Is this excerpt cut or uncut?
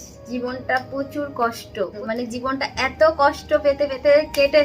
cut